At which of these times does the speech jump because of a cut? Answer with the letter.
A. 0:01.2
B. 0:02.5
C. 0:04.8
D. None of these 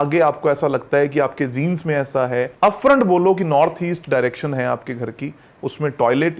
B